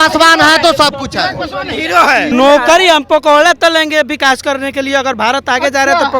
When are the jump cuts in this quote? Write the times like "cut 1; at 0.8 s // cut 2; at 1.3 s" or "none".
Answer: cut 1; at 2.3 s